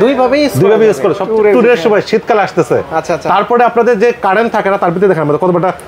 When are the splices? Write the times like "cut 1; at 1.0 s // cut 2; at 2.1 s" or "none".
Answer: cut 1; at 1.2 s